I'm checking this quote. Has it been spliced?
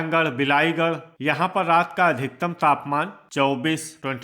yes; 1 cut; at 1.1 s

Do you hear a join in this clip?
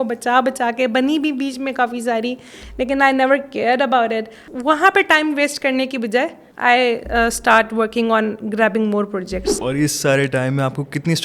yes; 1 cut; at 9.5 s

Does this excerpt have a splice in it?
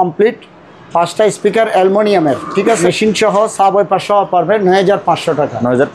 yes; 1 cut; at 2.8 s

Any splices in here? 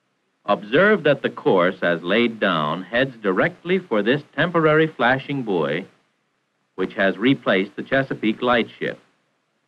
yes; 1 cut; at 7.5 s

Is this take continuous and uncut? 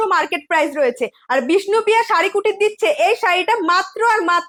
yes; 0 cuts

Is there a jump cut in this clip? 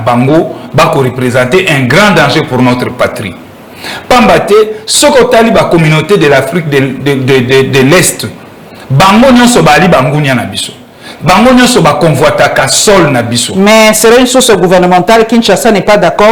no; 0 cuts

